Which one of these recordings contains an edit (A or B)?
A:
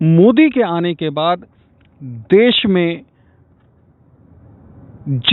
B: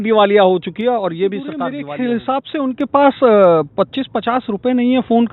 B